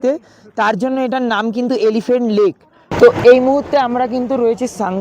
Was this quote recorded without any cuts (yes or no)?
no